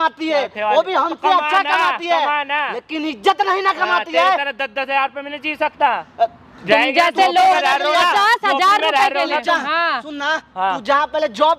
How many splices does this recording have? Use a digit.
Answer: 0